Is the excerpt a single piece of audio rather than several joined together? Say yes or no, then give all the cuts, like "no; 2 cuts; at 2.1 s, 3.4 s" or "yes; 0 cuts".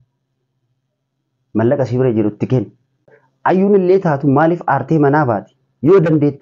no; 1 cut; at 3.1 s